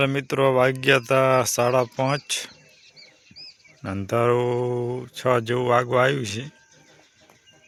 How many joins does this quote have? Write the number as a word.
zero